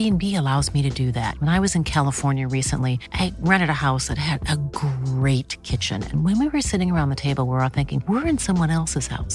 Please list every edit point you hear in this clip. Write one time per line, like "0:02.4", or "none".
none